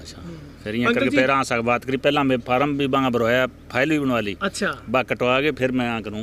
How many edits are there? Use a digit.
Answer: 0